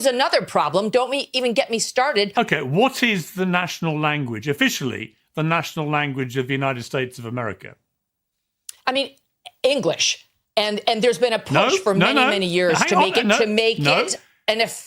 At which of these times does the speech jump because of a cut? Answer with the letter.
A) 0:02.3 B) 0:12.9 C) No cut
A